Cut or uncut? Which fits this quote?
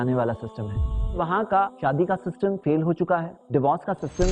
cut